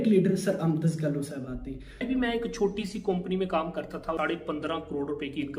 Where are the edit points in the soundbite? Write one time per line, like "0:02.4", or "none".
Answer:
0:02.0
0:04.2